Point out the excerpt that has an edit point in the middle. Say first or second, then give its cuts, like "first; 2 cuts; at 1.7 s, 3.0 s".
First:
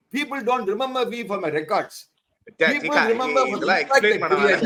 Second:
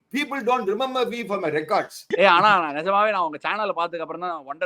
second; 1 cut; at 2.0 s